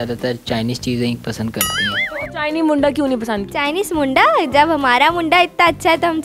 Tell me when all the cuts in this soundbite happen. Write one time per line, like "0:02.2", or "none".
0:03.5